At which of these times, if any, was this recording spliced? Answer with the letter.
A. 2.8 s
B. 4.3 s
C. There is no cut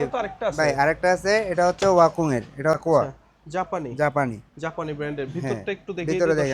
A